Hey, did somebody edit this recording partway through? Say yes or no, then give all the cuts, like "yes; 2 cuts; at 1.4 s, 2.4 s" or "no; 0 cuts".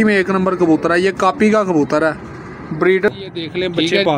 yes; 1 cut; at 3.1 s